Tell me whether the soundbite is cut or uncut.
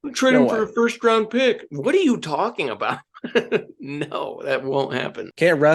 uncut